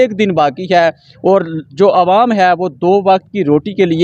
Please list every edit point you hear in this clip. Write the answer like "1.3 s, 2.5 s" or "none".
none